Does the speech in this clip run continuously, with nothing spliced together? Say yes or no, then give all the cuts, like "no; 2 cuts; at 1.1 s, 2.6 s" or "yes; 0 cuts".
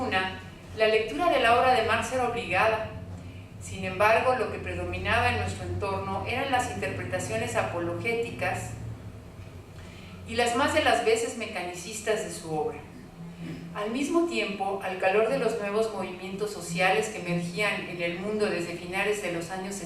no; 1 cut; at 5.8 s